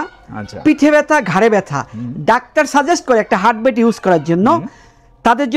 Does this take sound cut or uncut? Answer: uncut